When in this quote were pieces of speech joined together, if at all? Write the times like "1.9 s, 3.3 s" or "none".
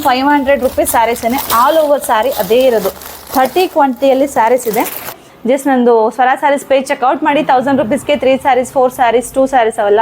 5.1 s